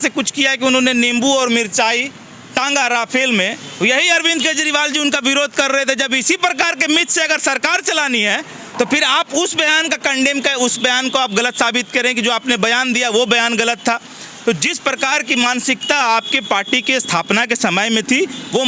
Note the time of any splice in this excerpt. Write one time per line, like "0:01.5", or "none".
none